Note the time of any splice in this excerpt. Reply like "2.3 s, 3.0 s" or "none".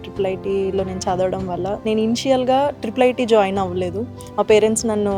none